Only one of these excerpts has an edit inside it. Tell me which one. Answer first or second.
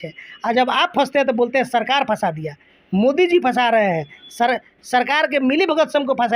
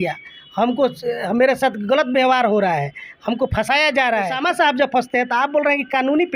second